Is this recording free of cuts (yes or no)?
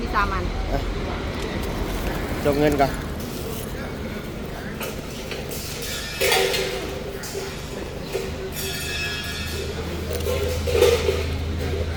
yes